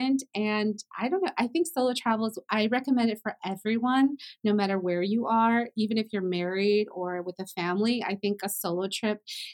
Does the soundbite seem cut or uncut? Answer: uncut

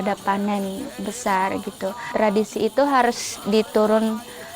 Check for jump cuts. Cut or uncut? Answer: cut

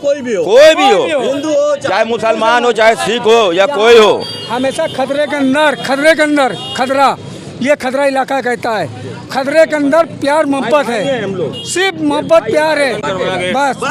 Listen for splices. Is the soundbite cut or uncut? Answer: uncut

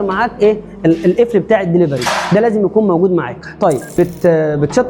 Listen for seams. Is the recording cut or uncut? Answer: cut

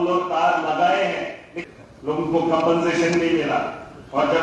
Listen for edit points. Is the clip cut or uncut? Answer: cut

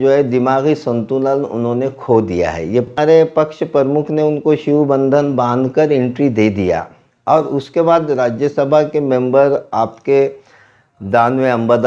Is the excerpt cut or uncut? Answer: cut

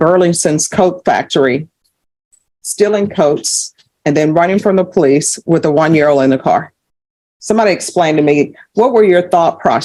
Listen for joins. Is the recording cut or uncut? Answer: uncut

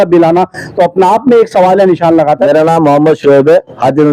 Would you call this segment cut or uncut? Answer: cut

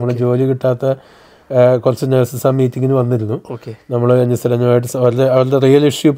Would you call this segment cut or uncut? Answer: uncut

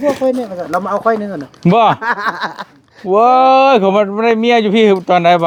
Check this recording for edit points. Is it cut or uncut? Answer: uncut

